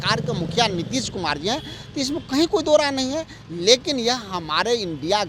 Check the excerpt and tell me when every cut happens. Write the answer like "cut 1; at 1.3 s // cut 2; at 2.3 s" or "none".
none